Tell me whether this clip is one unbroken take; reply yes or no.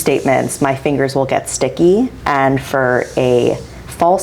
no